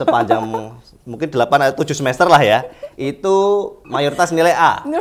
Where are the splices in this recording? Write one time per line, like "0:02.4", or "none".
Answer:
0:03.8